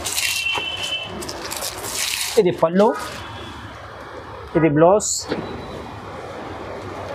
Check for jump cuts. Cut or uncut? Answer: uncut